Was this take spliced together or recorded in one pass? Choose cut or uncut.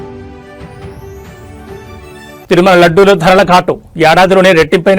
uncut